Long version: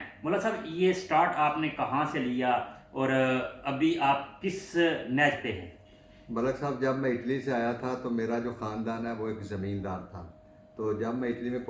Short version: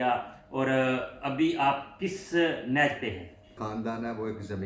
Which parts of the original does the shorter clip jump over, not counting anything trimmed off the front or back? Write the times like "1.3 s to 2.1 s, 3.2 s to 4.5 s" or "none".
6.0 s to 8.6 s